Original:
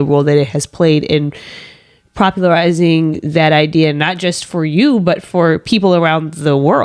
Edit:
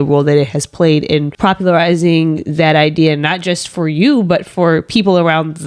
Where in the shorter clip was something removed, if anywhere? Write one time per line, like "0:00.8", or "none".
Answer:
0:01.3